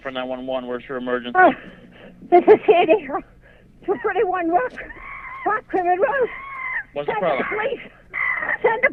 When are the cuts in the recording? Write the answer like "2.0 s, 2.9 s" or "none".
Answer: none